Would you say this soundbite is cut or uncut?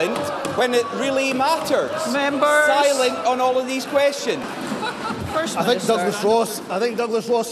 cut